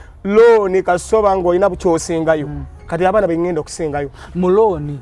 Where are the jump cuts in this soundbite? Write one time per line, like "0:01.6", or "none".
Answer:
0:02.8